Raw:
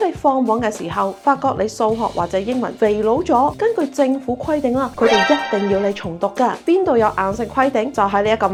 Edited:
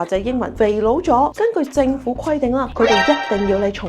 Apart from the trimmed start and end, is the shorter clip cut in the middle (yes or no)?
no